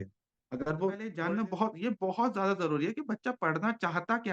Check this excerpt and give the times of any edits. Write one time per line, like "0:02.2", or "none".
0:01.2